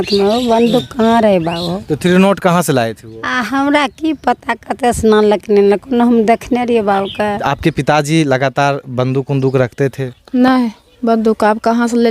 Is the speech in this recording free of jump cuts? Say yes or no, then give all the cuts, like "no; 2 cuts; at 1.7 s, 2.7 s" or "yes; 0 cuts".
no; 1 cut; at 7.4 s